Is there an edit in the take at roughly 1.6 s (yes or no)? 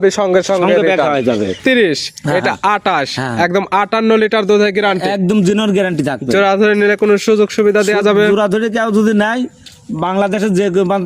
yes